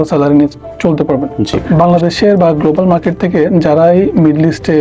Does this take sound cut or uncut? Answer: cut